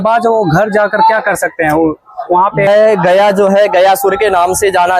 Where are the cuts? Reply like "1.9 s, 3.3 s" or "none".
2.7 s